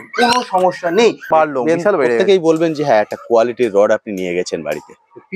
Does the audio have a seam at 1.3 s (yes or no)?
yes